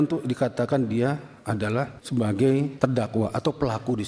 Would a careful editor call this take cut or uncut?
cut